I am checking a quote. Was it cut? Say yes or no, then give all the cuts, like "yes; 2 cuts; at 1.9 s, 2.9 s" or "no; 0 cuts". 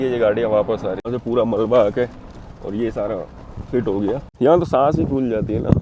yes; 2 cuts; at 1.1 s, 4.3 s